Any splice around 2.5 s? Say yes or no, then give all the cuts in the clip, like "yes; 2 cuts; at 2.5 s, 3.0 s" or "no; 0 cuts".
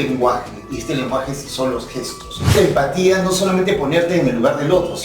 yes; 1 cut; at 2.5 s